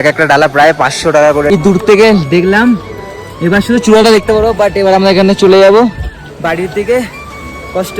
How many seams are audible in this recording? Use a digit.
1